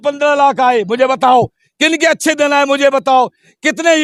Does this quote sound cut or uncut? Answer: uncut